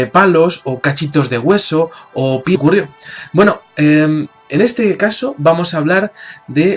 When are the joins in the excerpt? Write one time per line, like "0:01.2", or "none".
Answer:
none